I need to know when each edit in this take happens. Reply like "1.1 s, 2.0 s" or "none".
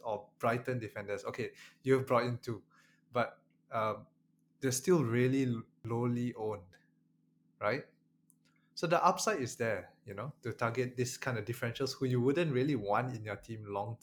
5.7 s